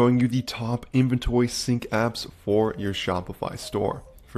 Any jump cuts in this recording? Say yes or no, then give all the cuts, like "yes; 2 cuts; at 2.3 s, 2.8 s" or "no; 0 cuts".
no; 0 cuts